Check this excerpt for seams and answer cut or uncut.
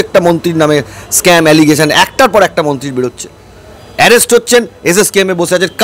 uncut